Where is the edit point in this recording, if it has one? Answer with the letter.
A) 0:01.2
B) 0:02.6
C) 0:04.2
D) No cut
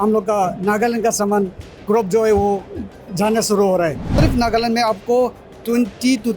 C